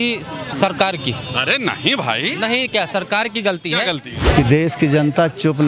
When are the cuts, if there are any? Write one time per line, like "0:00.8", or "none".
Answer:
0:04.1